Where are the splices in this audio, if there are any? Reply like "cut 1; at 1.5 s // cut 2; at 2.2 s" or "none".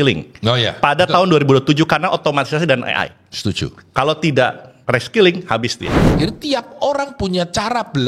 cut 1; at 6.1 s

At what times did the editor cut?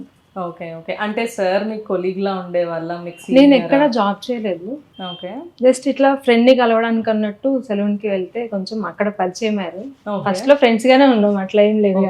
cut 1; at 4.8 s

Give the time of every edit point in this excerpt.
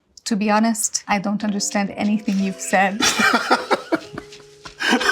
cut 1; at 0.9 s

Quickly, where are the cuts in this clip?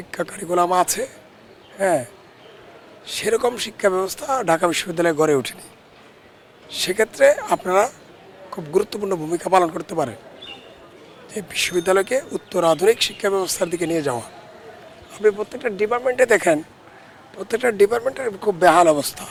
none

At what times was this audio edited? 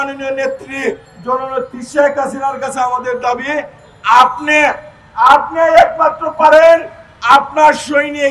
none

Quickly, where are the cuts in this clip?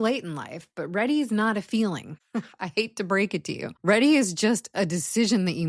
cut 1; at 2.1 s // cut 2; at 3.7 s

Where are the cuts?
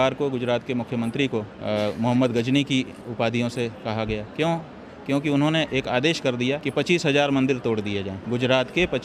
cut 1; at 1.5 s // cut 2; at 3.0 s // cut 3; at 4.3 s // cut 4; at 6.6 s // cut 5; at 8.1 s

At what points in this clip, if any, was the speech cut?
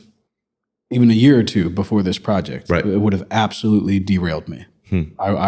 none

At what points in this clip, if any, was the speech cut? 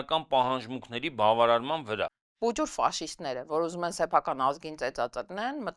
cut 1; at 2.2 s

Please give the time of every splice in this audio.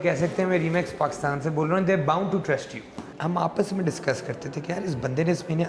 cut 1; at 3.0 s

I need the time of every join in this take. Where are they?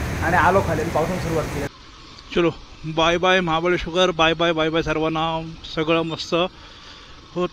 cut 1; at 1.7 s

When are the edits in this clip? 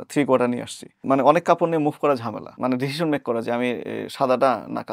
cut 1; at 1.0 s // cut 2; at 2.4 s

